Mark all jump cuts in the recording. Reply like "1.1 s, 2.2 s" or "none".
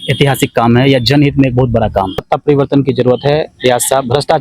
2.2 s